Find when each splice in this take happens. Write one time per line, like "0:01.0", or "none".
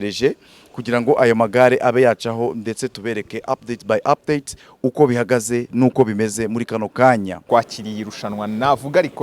0:07.4